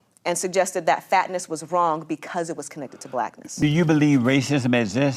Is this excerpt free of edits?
no; 1 cut; at 3.4 s

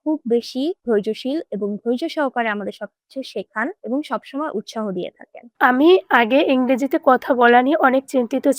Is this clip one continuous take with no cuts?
no; 1 cut; at 5.4 s

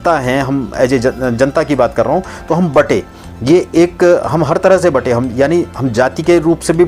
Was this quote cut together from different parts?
no; 0 cuts

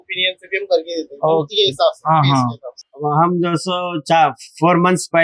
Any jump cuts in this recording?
yes; 1 cut; at 2.7 s

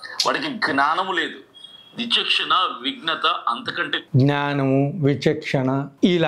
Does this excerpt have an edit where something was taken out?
no; 0 cuts

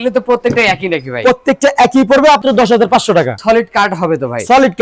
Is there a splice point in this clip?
yes; 2 cuts; at 2.4 s, 3.4 s

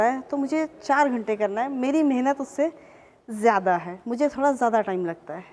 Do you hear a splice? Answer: no; 0 cuts

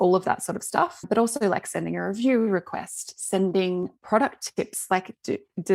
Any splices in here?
no; 0 cuts

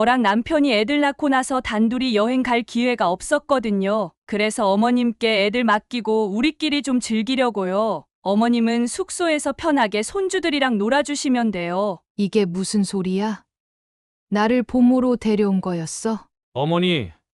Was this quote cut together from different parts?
yes; 2 cuts; at 12.0 s, 16.3 s

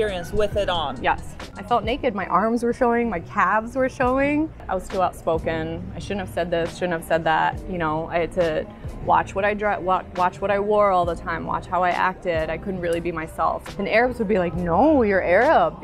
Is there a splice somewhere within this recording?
yes; 3 cuts; at 1.5 s, 4.7 s, 13.6 s

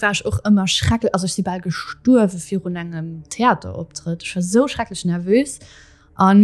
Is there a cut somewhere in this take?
no; 0 cuts

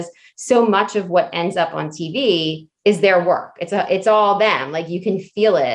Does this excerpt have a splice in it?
no; 0 cuts

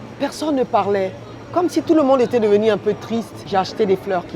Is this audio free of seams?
no; 1 cut; at 3.4 s

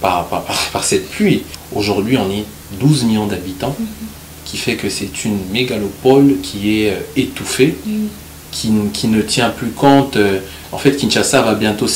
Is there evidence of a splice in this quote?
yes; 1 cut; at 1.5 s

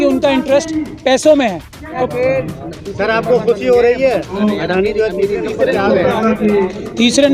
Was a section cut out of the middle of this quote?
yes; 1 cut; at 2.0 s

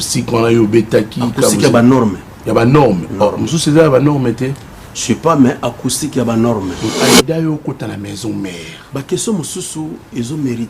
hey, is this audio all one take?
no; 1 cut; at 6.9 s

